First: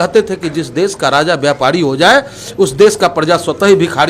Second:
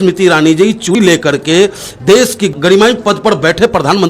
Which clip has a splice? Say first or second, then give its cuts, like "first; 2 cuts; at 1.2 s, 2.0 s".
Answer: second; 2 cuts; at 0.9 s, 2.5 s